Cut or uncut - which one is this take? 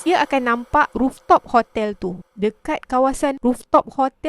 cut